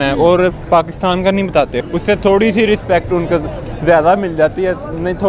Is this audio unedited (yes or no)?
no